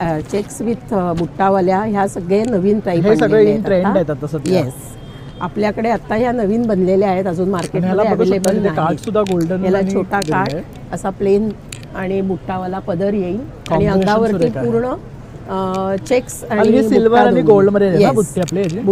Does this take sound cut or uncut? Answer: uncut